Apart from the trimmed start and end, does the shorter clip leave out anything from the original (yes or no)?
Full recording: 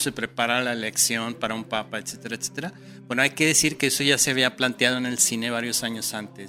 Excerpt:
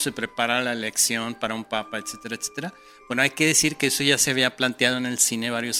no